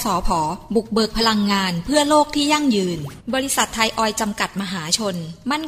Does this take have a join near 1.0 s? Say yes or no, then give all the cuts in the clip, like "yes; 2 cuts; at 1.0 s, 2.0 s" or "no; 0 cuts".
no; 1 cut; at 3.1 s